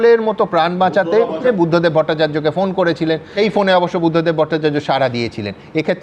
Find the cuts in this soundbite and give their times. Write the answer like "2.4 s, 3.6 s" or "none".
1.4 s, 3.3 s